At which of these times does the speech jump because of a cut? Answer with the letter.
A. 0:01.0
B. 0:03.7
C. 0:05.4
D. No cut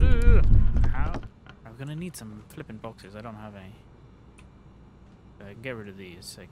A